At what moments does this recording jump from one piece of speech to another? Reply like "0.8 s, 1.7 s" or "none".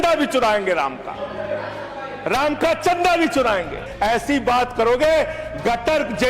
3.9 s